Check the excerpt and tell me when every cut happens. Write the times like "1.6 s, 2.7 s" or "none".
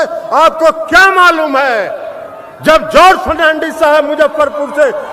none